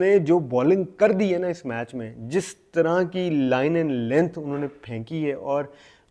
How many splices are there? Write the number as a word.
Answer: zero